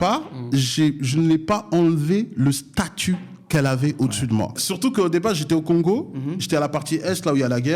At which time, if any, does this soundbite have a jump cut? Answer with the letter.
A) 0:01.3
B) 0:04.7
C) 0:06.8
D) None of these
B